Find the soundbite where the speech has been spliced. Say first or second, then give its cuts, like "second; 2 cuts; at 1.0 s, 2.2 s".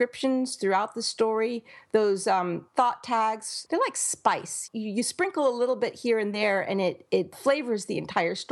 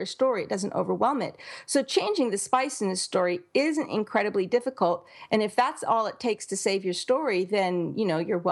first; 4 cuts; at 2.6 s, 3.6 s, 4.6 s, 7.3 s